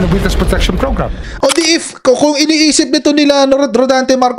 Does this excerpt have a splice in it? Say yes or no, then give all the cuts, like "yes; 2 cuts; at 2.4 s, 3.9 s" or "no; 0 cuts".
yes; 1 cut; at 1.2 s